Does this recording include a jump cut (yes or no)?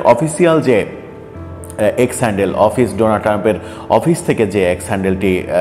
no